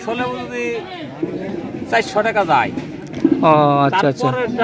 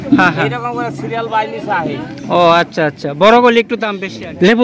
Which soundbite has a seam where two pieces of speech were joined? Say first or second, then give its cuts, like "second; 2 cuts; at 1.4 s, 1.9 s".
second; 1 cut; at 3.7 s